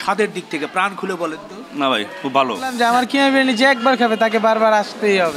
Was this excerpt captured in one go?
no; 1 cut; at 2.7 s

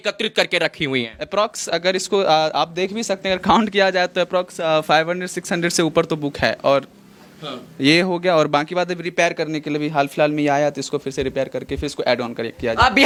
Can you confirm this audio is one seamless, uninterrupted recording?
yes; 0 cuts

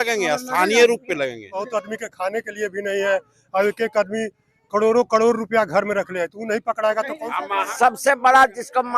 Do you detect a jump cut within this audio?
yes; 2 cuts; at 1.7 s, 7.7 s

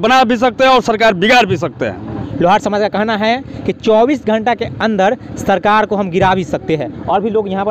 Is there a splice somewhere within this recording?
no; 0 cuts

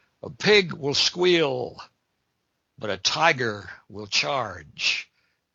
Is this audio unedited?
yes; 0 cuts

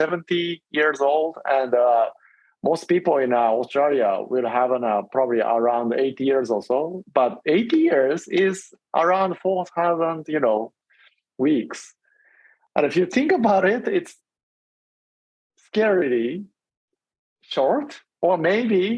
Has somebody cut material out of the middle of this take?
no; 0 cuts

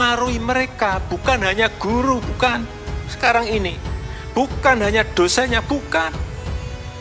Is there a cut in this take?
yes; 1 cut; at 6.1 s

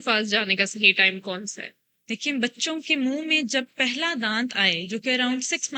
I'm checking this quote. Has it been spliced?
no; 0 cuts

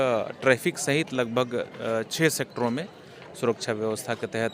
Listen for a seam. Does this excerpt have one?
no; 0 cuts

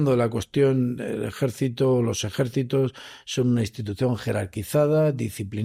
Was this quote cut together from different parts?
no; 0 cuts

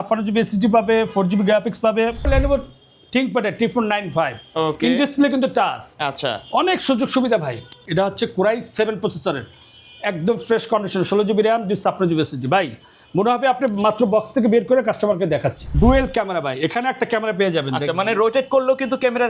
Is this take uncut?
no; 3 cuts; at 2.3 s, 7.7 s, 15.6 s

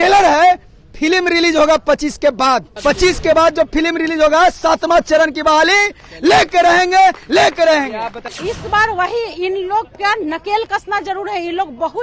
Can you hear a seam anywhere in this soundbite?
yes; 2 cuts; at 2.7 s, 8.3 s

